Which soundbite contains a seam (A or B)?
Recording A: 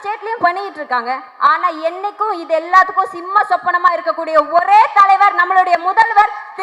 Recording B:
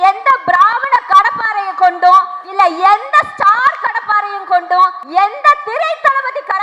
B